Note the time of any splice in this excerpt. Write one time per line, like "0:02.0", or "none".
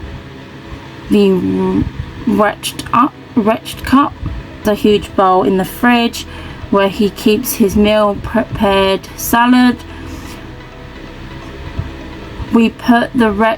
0:04.6